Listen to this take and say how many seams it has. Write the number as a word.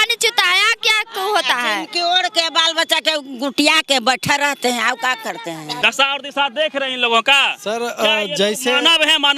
one